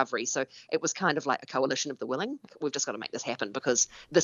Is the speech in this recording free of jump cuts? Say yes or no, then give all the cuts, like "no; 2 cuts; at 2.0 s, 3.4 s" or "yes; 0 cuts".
no; 1 cut; at 2.5 s